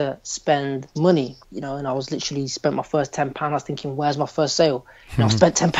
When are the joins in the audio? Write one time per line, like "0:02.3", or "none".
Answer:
0:00.9
0:01.5